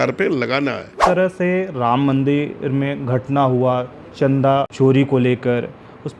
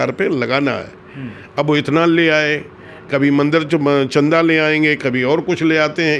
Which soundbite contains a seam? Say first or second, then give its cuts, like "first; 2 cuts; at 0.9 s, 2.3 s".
first; 2 cuts; at 1.0 s, 4.7 s